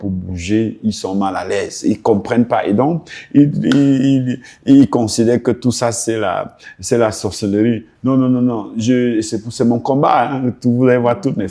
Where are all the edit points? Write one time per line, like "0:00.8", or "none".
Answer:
none